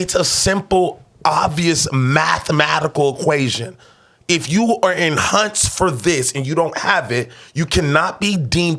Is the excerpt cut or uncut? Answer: uncut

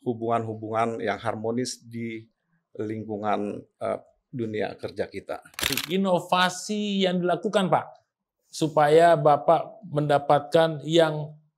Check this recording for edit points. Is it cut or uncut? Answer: cut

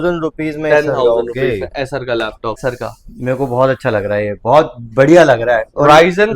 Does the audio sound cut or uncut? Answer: cut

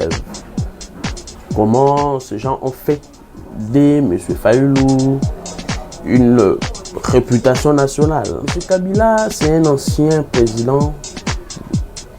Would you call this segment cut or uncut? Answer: cut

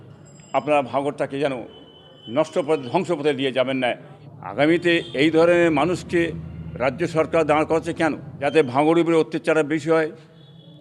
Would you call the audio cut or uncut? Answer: cut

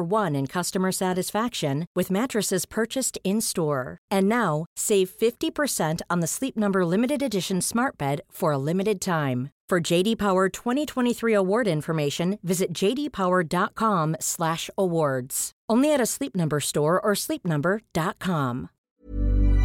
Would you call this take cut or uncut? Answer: cut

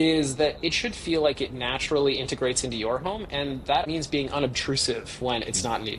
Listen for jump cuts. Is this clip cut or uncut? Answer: cut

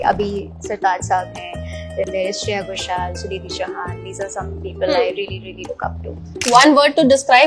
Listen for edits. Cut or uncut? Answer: cut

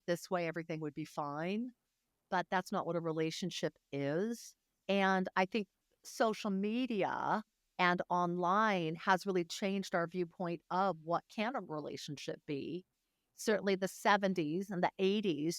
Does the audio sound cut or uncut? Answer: cut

